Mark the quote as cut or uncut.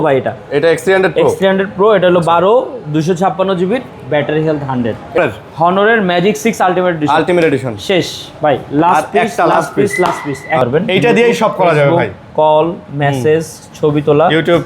cut